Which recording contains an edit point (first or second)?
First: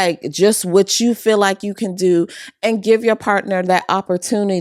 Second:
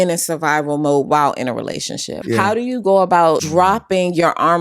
second